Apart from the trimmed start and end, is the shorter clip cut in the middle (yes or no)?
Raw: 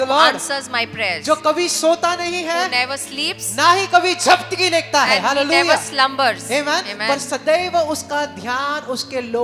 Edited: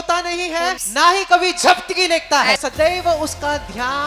yes